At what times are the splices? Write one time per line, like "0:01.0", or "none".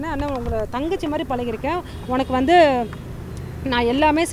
0:02.0